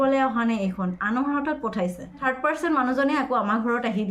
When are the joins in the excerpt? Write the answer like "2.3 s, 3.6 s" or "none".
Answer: 2.2 s